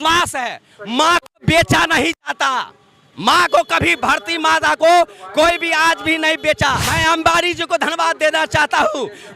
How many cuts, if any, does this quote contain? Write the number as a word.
one